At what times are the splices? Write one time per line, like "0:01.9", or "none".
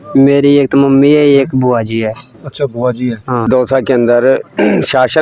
0:03.5